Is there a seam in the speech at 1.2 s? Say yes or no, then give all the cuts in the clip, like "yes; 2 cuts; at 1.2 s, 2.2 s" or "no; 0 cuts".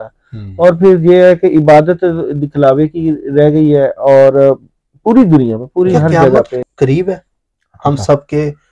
no; 1 cut; at 6.6 s